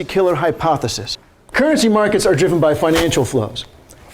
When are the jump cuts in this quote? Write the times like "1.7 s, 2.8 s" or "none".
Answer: 1.2 s